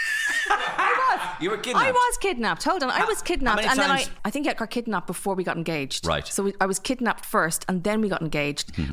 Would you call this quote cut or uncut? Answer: cut